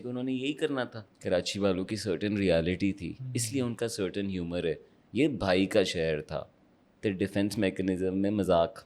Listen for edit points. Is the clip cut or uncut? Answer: cut